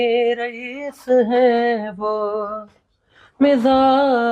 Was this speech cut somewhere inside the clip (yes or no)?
no